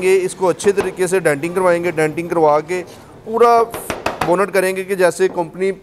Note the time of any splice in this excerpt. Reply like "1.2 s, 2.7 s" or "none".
none